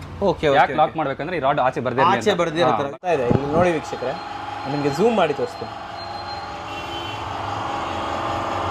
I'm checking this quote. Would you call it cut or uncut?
cut